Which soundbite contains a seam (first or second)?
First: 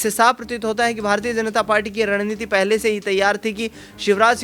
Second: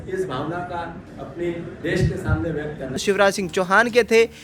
second